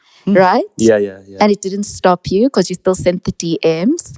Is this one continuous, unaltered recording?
yes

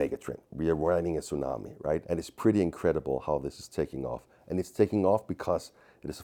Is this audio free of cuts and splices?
no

